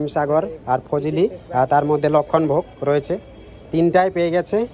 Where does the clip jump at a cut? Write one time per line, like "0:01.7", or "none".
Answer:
none